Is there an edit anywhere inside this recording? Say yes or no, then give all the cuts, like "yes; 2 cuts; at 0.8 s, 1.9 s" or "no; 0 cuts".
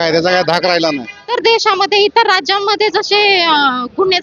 yes; 1 cut; at 1.4 s